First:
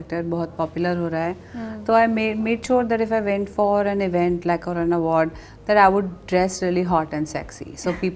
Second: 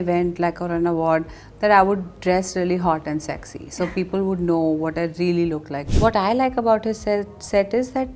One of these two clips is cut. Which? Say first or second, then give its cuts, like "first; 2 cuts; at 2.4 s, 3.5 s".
second; 1 cut; at 5.8 s